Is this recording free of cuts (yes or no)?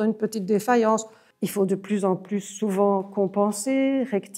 no